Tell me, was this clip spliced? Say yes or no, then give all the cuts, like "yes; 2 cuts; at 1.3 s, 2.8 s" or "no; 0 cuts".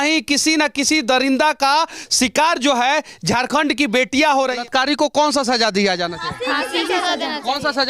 yes; 1 cut; at 4.6 s